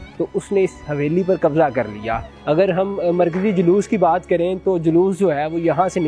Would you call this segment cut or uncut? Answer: cut